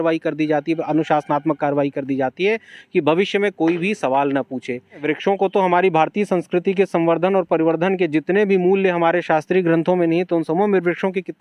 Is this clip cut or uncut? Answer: cut